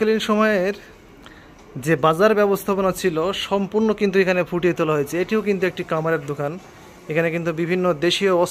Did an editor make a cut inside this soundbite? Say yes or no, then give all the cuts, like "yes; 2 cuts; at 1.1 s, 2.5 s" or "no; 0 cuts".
no; 0 cuts